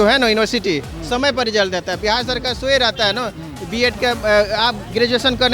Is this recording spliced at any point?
no; 0 cuts

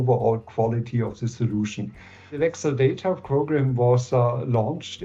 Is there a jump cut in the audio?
yes; 1 cut; at 2.3 s

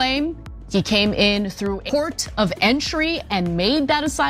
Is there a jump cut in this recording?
yes; 1 cut; at 1.8 s

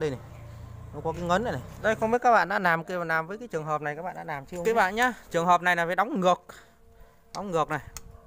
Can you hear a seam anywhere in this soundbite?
yes; 2 cuts; at 1.7 s, 4.5 s

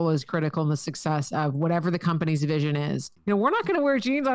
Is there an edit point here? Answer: yes; 1 cut; at 3.1 s

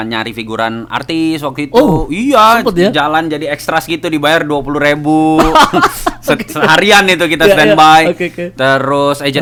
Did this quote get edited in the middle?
no; 0 cuts

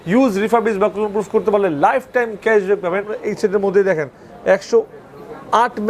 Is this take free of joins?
no; 1 cut; at 3.2 s

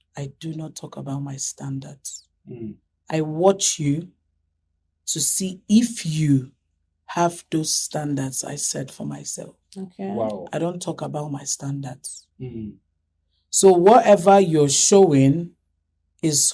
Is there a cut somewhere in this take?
no; 0 cuts

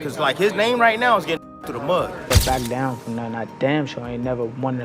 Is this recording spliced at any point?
yes; 1 cut; at 2.3 s

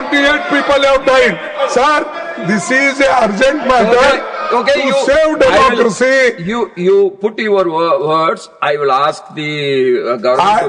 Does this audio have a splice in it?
no; 0 cuts

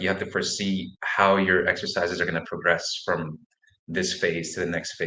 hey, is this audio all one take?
yes; 0 cuts

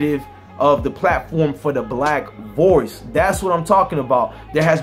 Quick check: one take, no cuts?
yes; 0 cuts

